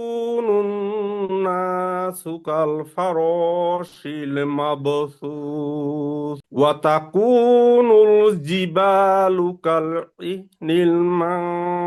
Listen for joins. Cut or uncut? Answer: uncut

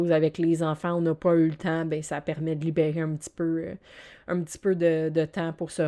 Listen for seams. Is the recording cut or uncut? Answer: uncut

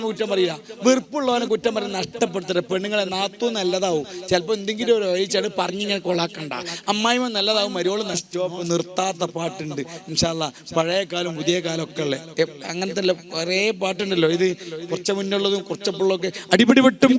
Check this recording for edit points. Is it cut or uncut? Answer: cut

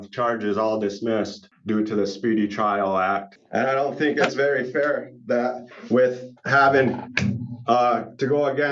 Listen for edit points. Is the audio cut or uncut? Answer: cut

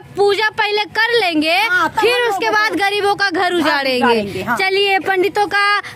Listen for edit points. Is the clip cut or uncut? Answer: uncut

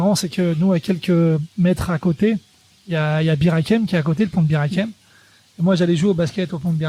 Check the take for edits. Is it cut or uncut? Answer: uncut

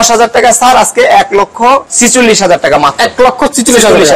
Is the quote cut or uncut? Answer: cut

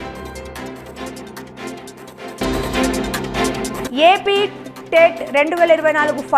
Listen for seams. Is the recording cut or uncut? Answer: cut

